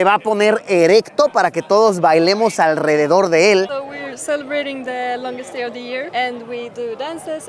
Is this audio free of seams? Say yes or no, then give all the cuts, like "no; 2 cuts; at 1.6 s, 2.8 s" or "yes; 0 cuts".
no; 1 cut; at 3.7 s